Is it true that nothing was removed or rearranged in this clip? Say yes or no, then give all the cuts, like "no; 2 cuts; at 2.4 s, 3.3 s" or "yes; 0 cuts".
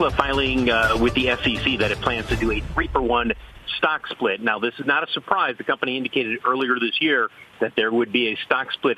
yes; 0 cuts